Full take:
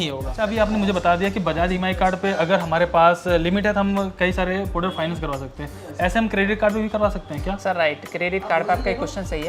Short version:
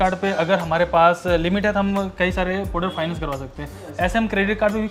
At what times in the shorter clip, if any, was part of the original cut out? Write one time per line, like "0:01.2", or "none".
none